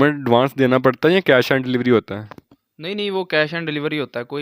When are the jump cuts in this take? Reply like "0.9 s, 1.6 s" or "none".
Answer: none

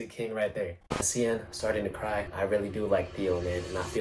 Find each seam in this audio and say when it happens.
1.0 s, 2.3 s

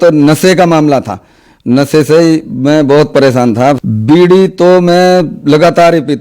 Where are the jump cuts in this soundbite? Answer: 3.8 s

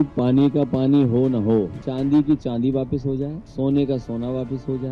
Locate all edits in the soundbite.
1.8 s, 3.4 s

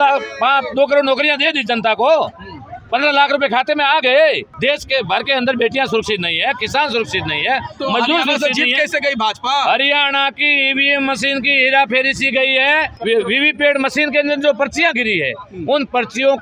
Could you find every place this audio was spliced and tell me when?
4.5 s, 13.0 s

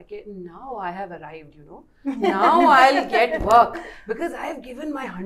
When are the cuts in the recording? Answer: none

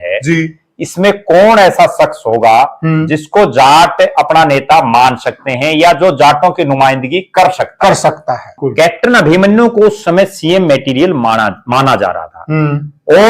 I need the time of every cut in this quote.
8.5 s

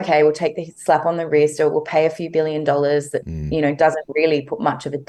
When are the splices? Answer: none

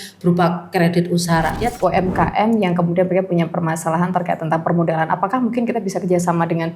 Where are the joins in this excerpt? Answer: 1.7 s

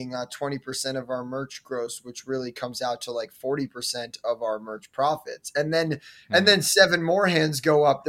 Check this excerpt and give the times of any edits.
none

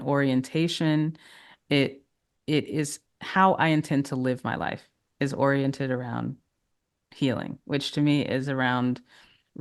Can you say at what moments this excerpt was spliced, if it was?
none

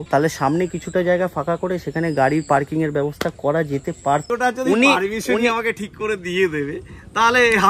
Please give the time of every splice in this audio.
4.2 s

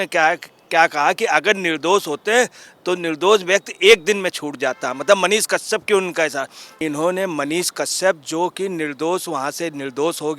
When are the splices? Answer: 6.8 s

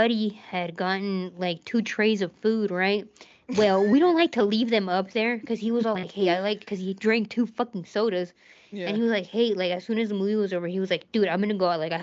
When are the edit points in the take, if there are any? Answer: none

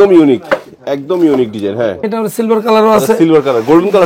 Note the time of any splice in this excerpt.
2.1 s

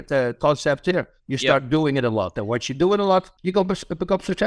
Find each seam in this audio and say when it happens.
3.4 s

